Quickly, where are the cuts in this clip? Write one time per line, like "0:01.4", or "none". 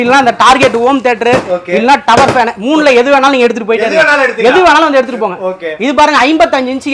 none